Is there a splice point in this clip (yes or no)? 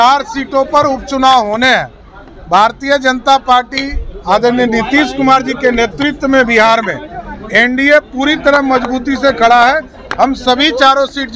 no